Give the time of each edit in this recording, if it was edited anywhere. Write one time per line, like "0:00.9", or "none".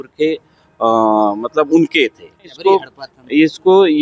0:02.5